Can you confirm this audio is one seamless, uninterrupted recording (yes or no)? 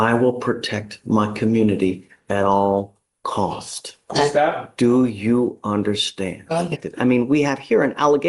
no